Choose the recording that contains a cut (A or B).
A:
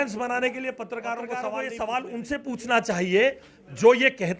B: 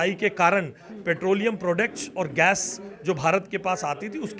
A